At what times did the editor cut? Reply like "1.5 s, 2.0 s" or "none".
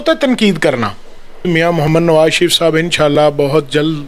1.4 s